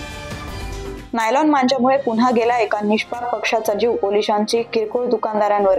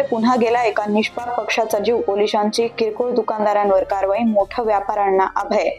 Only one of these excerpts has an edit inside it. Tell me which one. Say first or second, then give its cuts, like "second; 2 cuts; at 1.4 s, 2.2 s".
first; 1 cut; at 0.9 s